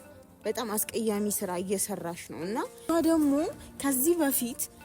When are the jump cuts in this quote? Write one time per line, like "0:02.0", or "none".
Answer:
0:02.9